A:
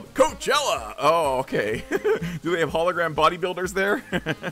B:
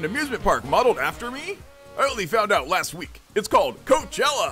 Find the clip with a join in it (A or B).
B